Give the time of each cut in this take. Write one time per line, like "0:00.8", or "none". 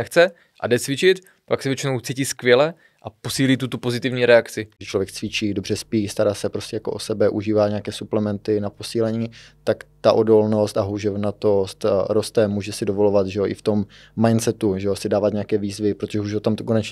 0:04.8